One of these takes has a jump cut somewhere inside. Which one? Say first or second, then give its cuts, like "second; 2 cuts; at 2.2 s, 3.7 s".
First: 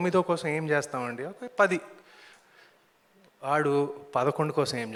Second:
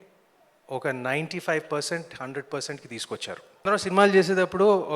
second; 1 cut; at 3.6 s